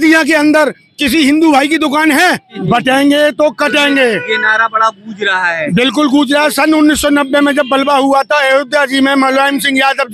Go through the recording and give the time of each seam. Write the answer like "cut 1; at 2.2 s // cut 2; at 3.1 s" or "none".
cut 1; at 2.5 s